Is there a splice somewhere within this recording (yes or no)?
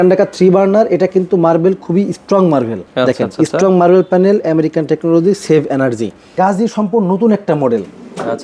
yes